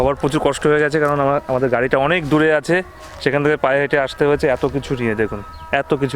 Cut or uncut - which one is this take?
uncut